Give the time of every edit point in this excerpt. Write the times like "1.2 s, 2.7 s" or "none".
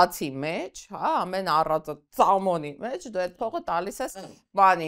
none

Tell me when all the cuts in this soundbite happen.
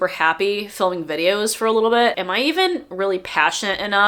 2.2 s

